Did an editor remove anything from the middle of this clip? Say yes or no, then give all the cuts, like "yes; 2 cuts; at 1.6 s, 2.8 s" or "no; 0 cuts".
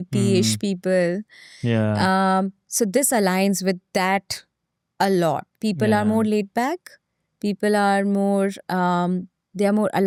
no; 0 cuts